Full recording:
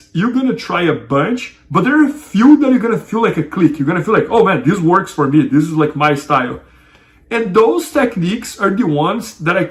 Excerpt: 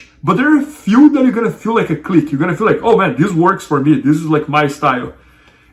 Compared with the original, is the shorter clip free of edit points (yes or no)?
yes